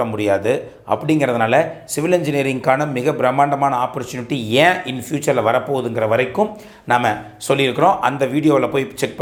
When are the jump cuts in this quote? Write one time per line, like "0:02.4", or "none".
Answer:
none